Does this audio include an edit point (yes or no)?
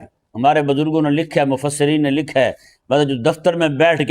no